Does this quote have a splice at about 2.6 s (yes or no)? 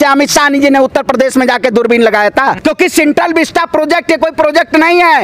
yes